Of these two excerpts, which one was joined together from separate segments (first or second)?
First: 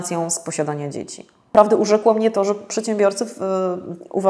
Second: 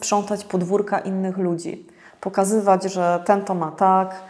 first